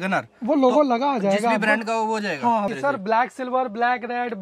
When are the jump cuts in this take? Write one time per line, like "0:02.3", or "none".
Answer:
0:02.7